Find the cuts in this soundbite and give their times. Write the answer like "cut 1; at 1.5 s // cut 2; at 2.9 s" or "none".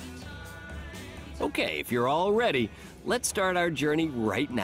cut 1; at 1.4 s